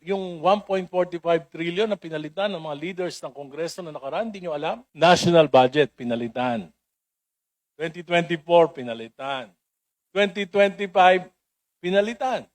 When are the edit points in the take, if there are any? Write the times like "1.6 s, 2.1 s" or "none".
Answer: 4.9 s

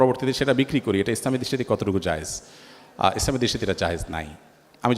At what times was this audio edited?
none

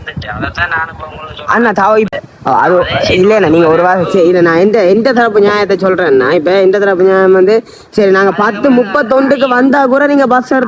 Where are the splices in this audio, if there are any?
none

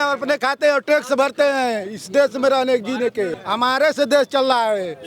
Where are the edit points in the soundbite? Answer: 3.4 s

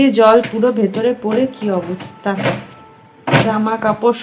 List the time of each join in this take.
none

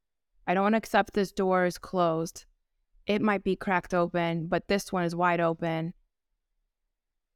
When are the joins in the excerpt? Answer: none

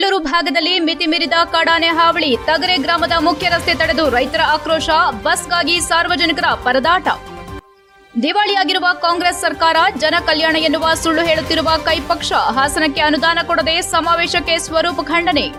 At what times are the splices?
none

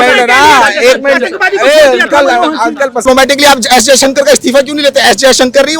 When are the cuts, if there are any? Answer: 3.0 s

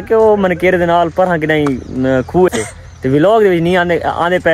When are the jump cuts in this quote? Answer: 2.5 s

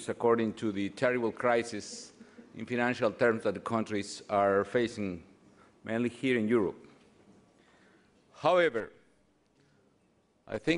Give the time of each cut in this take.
9.3 s

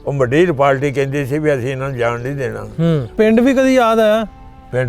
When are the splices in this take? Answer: 3.1 s

